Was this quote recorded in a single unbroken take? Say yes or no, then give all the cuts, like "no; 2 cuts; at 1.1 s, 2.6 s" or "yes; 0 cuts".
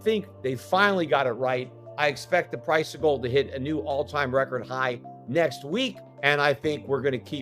no; 2 cuts; at 1.8 s, 6.1 s